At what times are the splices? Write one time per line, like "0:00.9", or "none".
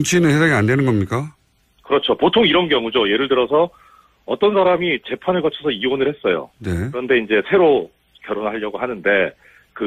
none